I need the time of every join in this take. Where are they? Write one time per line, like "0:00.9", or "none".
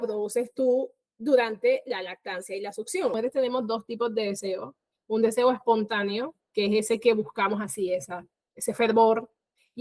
0:03.2